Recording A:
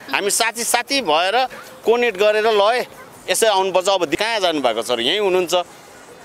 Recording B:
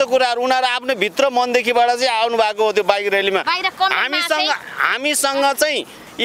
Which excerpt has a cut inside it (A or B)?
A